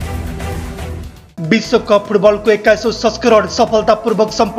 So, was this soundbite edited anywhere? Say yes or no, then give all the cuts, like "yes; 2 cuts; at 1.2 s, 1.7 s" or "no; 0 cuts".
yes; 1 cut; at 1.2 s